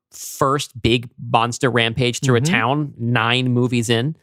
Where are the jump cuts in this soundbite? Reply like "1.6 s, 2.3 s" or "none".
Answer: none